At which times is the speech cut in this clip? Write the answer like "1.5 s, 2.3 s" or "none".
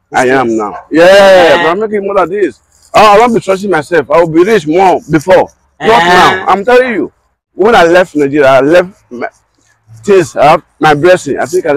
7.5 s